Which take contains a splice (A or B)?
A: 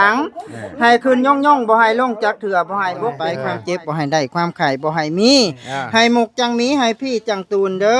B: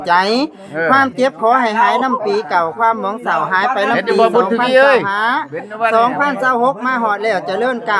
A